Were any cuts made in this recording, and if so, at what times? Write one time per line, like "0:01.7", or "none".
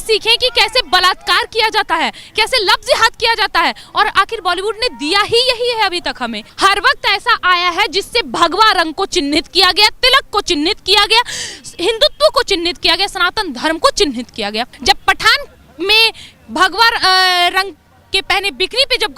0:06.4
0:14.7